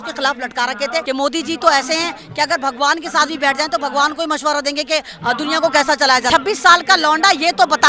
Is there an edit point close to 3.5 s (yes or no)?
no